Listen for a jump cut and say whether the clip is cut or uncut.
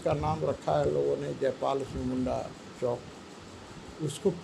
uncut